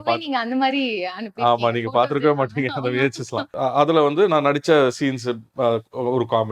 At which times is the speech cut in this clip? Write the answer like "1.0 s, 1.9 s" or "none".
3.5 s